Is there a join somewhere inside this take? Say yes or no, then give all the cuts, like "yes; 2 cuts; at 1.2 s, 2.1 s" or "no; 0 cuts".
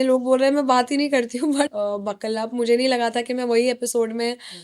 yes; 1 cut; at 1.7 s